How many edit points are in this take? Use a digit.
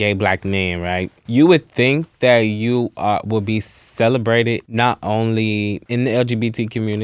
3